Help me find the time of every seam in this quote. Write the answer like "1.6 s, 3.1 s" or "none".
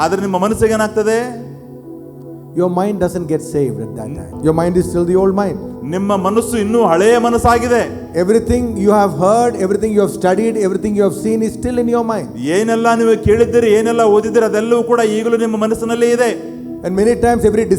4.3 s